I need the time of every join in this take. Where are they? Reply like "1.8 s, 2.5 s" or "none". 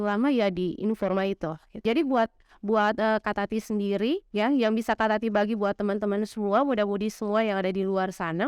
1.8 s